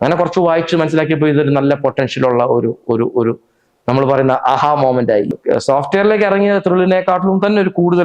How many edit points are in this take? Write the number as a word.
one